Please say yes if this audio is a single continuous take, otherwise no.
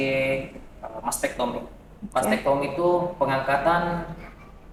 yes